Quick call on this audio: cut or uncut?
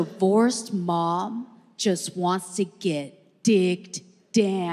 uncut